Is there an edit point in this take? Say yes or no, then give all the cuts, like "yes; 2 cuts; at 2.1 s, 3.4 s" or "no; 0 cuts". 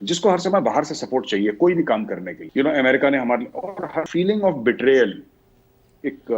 yes; 2 cuts; at 2.4 s, 4.0 s